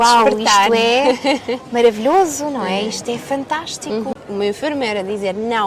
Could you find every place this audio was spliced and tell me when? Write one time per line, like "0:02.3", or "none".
0:04.1